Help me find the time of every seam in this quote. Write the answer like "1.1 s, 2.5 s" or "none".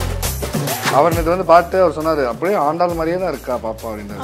0.9 s